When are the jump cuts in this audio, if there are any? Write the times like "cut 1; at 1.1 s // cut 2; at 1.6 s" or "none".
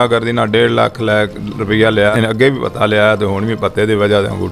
cut 1; at 2.1 s